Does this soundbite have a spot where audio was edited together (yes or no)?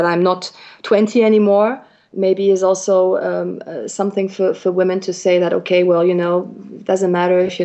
no